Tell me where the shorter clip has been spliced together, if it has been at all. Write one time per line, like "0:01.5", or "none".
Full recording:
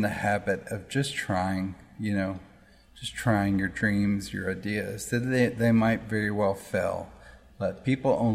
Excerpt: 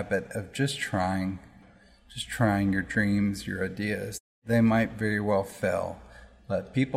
0:01.6
0:04.4